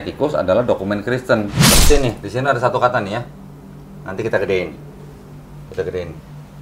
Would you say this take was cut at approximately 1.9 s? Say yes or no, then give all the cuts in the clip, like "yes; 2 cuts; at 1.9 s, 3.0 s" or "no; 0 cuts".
yes; 1 cut; at 1.9 s